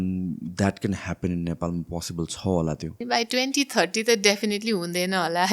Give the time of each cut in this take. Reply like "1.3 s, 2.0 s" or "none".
3.0 s